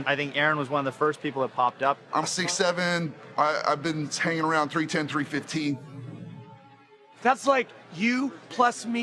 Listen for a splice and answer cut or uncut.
uncut